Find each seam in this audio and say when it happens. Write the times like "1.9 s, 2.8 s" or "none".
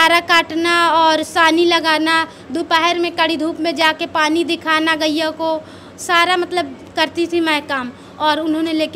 none